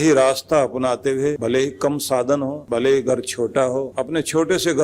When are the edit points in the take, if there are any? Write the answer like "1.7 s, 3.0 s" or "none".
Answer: 1.4 s, 2.6 s, 3.9 s